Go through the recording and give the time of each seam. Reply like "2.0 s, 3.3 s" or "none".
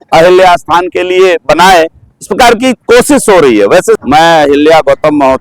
4.0 s